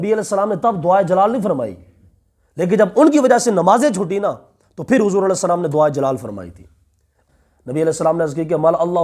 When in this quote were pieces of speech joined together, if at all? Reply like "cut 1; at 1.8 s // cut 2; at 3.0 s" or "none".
cut 1; at 7.1 s

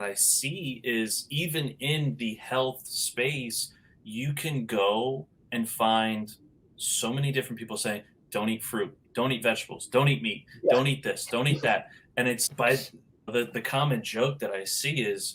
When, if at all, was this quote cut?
none

